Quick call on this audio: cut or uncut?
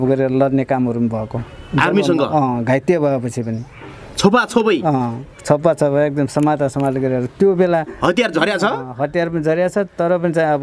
uncut